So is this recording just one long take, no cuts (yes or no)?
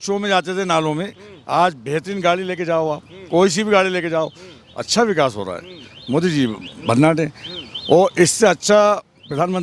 yes